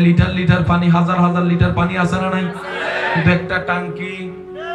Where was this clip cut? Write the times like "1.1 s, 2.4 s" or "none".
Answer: none